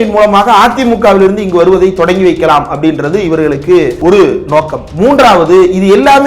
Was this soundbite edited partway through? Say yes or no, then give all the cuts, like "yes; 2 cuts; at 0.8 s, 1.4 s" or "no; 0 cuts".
yes; 2 cuts; at 3.9 s, 4.8 s